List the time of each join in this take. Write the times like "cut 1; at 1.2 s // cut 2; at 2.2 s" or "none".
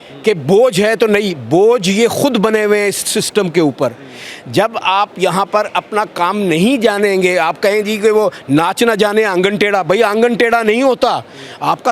none